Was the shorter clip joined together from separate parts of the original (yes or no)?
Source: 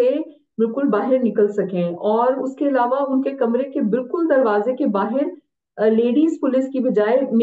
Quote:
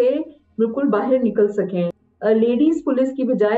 yes